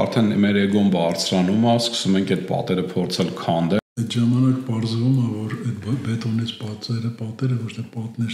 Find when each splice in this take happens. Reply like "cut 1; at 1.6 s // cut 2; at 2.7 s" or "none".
cut 1; at 3.8 s